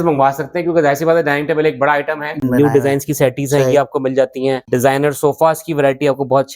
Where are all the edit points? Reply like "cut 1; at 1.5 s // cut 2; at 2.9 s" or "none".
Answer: cut 1; at 2.4 s // cut 2; at 4.6 s